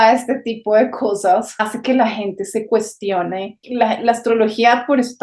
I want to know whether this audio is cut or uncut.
cut